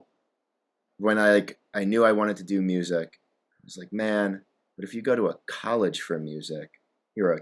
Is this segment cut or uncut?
uncut